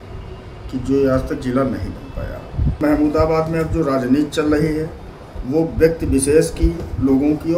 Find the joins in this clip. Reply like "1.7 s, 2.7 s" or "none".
2.8 s